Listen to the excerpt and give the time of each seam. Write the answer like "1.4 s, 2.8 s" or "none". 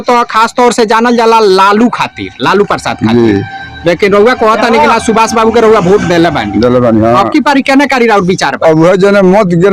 none